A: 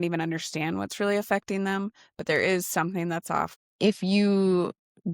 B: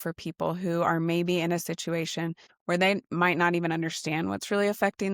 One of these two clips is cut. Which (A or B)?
A